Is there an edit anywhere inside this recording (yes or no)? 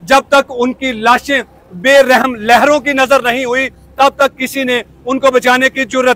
no